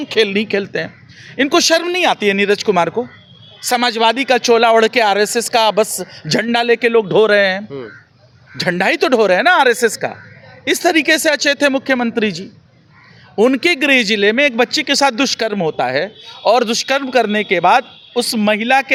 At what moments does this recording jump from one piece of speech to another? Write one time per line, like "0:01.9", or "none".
none